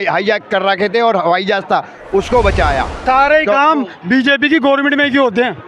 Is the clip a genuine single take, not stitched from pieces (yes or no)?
no